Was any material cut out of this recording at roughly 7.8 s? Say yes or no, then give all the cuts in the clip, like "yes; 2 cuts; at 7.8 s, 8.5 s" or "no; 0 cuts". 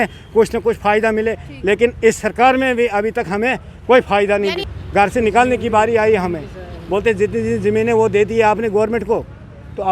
no; 1 cut; at 4.7 s